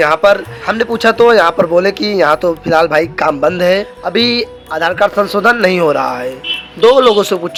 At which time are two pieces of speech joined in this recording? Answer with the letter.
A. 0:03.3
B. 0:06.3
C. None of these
C